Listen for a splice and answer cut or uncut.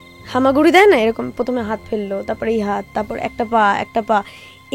uncut